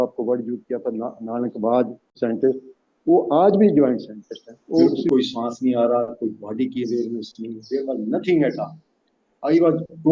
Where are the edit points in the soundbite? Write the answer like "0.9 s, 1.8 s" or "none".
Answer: 2.0 s, 4.9 s